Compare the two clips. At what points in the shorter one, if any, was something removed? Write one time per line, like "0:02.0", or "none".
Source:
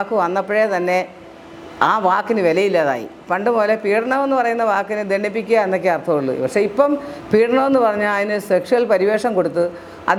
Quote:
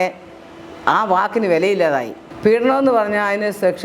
0:02.2